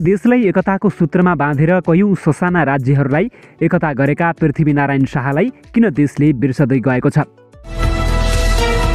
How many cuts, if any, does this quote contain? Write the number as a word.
one